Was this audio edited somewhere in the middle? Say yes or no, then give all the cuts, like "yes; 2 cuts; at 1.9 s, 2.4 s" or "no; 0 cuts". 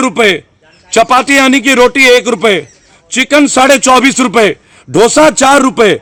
no; 0 cuts